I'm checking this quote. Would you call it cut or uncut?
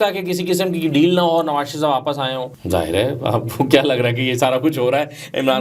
cut